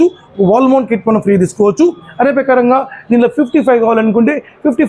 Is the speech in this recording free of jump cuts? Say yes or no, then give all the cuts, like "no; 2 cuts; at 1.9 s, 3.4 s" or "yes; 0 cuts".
yes; 0 cuts